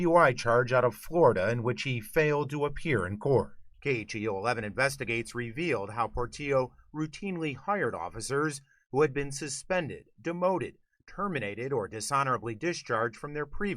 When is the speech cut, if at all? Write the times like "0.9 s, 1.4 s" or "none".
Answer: 3.6 s